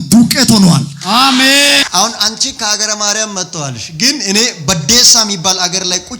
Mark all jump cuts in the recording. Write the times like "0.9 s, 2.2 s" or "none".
1.8 s